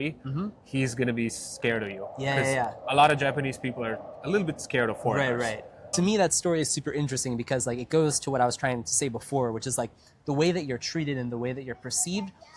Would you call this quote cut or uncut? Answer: cut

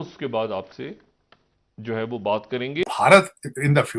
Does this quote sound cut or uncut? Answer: cut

